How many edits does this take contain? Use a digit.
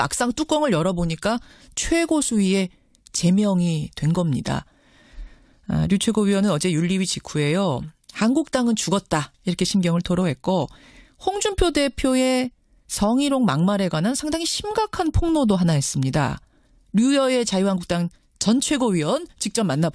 1